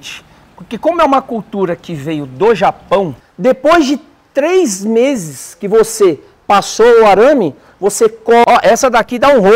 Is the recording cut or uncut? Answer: cut